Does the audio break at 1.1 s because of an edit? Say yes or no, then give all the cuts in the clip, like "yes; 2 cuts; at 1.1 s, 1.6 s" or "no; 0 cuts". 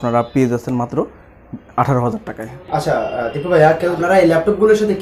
no; 0 cuts